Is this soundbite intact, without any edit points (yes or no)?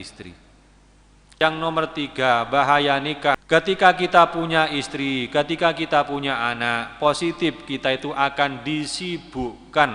no